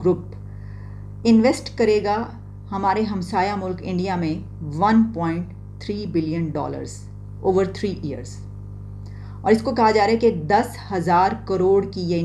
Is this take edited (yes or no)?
no